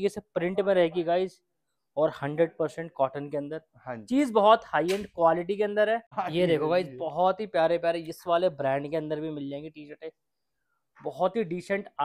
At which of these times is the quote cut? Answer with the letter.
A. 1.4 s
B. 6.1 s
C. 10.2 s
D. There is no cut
B